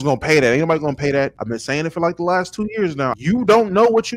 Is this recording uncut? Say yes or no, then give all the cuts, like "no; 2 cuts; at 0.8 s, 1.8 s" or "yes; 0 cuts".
no; 2 cuts; at 1.4 s, 3.1 s